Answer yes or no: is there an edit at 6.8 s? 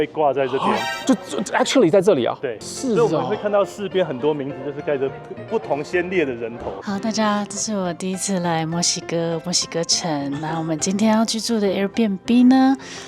yes